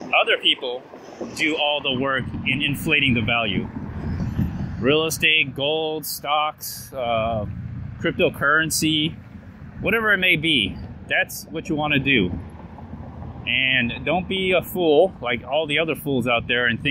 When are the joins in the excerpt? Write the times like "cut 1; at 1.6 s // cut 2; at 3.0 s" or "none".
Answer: none